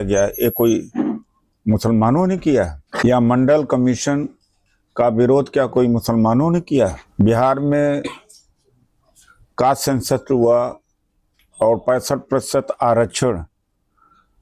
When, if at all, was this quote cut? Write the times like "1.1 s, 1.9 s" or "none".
2.8 s, 7.0 s